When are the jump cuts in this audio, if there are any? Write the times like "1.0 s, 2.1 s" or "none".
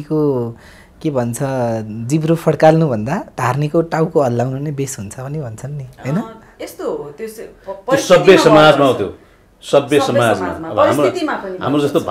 none